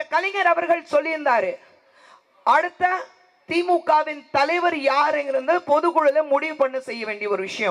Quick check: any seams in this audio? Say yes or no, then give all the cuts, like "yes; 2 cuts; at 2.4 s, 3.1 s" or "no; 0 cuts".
no; 0 cuts